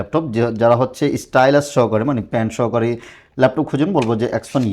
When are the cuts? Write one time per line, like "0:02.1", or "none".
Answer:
none